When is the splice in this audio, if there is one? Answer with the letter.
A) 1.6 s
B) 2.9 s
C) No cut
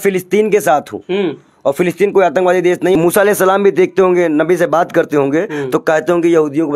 B